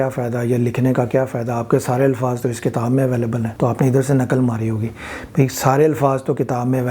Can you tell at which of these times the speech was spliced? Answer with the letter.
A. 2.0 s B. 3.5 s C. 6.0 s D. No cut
B